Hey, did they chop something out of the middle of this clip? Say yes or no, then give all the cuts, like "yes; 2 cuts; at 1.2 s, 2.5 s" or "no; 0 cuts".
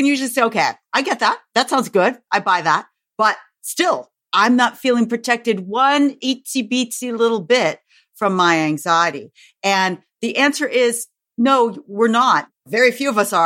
no; 0 cuts